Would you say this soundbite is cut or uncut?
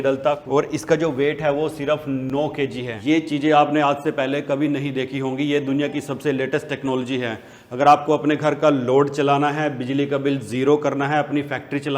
cut